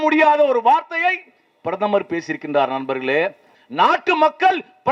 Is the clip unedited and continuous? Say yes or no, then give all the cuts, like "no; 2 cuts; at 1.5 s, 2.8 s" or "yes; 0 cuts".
no; 1 cut; at 3.5 s